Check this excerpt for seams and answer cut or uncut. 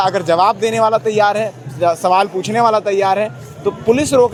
uncut